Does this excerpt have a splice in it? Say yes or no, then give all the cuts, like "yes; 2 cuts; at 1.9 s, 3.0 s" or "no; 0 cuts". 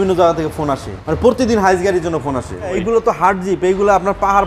yes; 2 cuts; at 1.0 s, 2.8 s